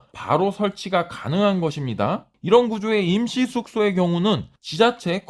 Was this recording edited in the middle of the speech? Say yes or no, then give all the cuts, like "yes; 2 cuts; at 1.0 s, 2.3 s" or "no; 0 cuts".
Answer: yes; 1 cut; at 2.3 s